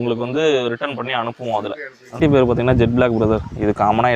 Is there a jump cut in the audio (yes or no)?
yes